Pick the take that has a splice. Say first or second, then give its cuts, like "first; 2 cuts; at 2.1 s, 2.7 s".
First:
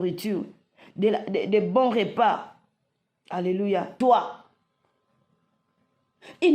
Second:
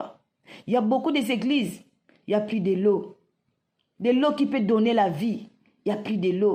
first; 1 cut; at 4.0 s